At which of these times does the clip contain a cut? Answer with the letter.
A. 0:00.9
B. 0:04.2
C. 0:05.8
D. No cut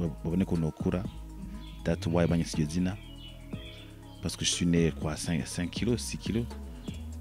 D